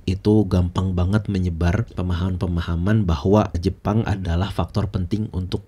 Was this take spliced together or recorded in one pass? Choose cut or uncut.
uncut